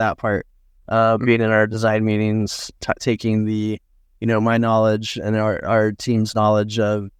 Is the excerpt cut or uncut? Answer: uncut